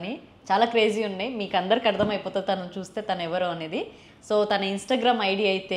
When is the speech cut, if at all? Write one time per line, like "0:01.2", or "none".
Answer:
none